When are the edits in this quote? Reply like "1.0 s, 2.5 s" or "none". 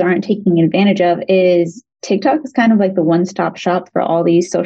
none